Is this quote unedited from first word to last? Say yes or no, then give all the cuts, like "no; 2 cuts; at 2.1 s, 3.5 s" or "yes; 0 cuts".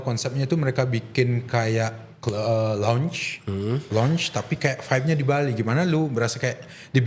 yes; 0 cuts